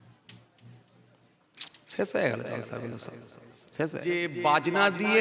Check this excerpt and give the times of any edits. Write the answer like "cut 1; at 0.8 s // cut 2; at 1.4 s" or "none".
cut 1; at 4.0 s